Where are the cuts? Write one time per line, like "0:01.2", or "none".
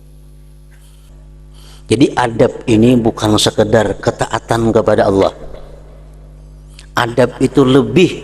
0:01.1

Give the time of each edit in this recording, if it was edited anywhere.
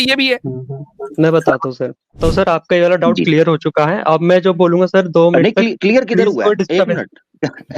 0:02.2

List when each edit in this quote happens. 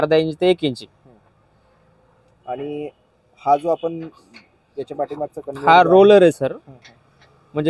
none

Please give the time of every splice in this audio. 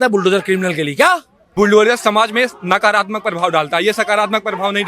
0:01.4

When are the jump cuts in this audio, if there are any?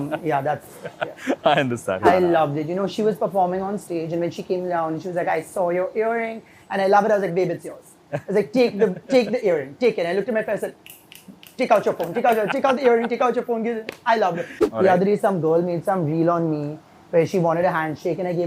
0:02.0
0:14.5

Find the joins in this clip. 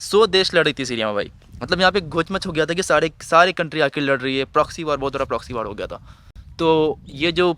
none

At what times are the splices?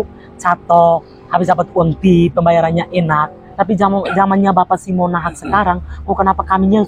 0:03.4

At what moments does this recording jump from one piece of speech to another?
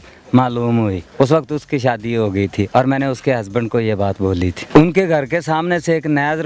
0:01.0
0:04.6

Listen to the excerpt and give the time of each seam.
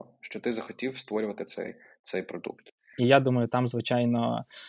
0:02.9

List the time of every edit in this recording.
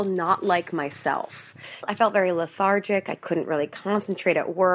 0:01.9

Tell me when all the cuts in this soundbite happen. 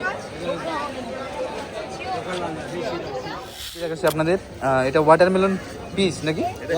0:03.9

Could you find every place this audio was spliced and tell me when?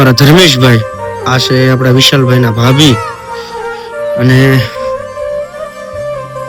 0:04.6

